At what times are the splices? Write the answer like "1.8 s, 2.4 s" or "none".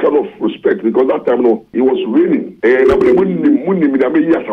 1.7 s, 2.5 s